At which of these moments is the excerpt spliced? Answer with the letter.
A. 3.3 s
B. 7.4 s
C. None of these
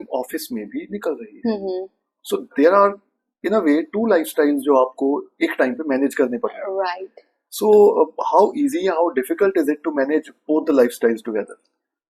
C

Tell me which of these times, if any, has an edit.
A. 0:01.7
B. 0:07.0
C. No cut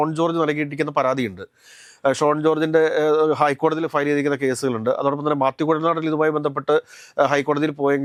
C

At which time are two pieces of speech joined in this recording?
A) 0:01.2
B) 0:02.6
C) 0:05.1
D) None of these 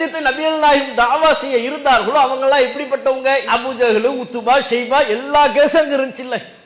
D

